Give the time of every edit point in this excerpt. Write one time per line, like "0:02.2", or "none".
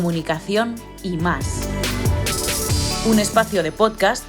0:01.5
0:03.0